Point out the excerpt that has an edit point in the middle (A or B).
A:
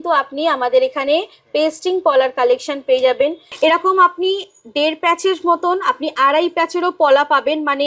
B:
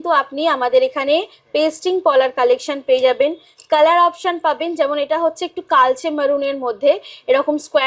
A